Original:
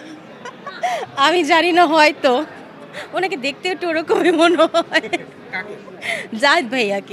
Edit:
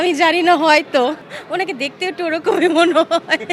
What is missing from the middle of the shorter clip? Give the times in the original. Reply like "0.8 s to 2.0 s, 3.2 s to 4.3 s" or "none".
2.6 s to 3.0 s